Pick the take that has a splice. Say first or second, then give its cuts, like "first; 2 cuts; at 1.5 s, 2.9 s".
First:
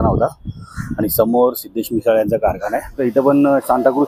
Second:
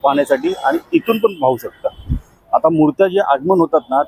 first; 1 cut; at 3.0 s